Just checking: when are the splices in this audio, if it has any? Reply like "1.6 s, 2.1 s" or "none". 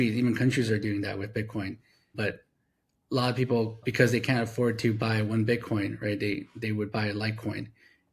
1.9 s, 3.8 s

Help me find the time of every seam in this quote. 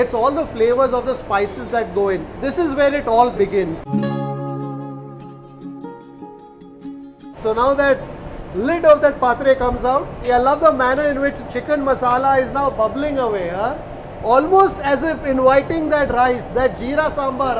2.4 s, 3.8 s, 10.1 s

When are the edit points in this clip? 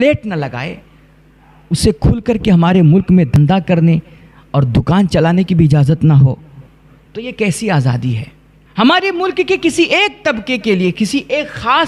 none

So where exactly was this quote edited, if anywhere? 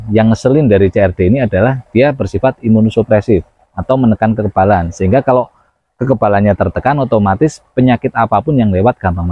none

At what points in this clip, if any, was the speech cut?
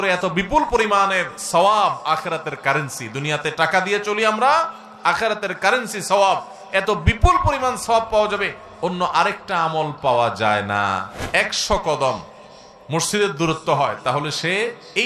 11.1 s

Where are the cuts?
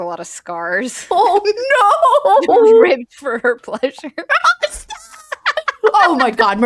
1.0 s, 4.2 s

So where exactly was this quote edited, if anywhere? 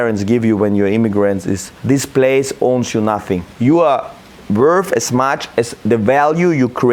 1.7 s, 3.5 s, 5.8 s

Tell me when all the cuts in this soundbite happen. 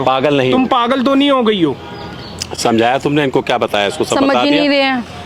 none

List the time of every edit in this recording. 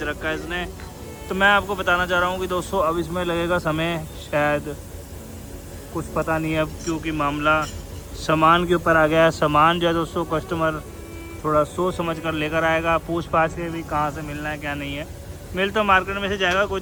none

